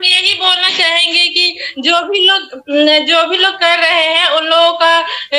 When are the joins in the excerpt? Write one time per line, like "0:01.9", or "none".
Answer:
none